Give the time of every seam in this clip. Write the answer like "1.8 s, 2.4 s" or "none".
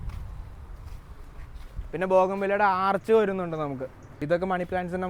4.2 s